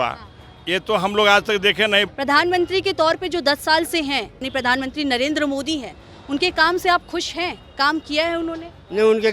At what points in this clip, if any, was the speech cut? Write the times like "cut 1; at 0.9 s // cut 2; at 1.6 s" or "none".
cut 1; at 2.1 s // cut 2; at 4.5 s